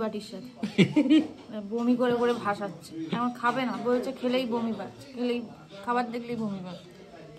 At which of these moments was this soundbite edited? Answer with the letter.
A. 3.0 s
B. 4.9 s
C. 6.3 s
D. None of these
D